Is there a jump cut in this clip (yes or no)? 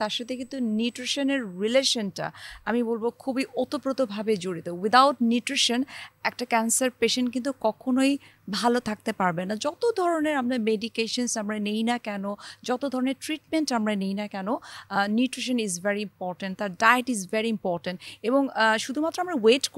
no